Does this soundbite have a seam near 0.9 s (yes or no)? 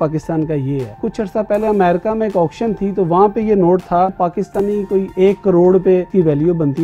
yes